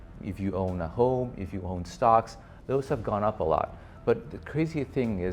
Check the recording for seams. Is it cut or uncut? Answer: cut